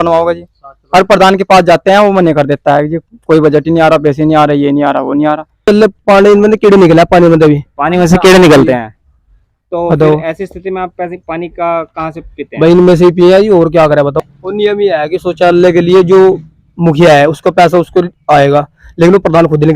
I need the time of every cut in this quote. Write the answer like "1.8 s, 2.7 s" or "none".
5.7 s, 14.2 s